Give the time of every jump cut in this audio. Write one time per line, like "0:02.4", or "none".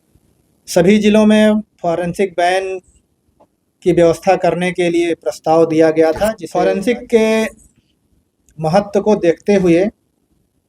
0:06.5